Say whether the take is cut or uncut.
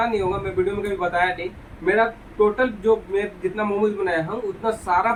uncut